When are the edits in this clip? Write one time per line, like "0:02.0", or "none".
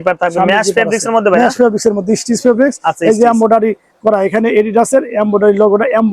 none